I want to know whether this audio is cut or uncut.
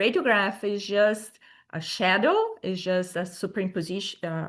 uncut